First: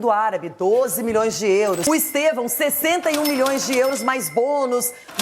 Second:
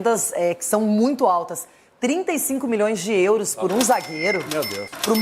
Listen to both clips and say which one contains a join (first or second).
first